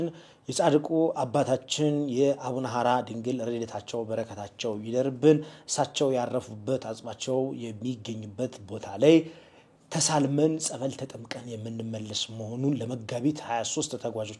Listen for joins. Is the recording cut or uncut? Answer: uncut